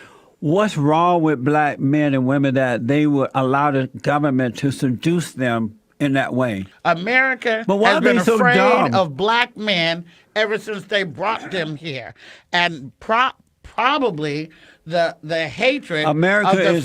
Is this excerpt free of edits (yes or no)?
no